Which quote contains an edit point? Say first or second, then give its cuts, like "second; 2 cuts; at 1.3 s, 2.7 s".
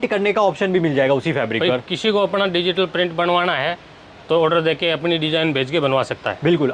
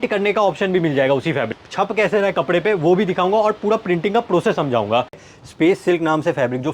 second; 2 cuts; at 1.5 s, 5.2 s